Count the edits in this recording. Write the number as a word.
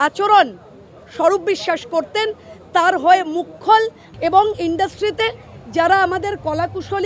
one